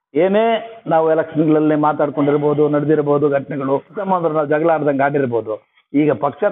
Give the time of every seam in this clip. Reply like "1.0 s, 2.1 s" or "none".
4.0 s